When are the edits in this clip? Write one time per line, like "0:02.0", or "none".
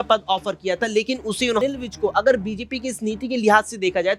0:01.6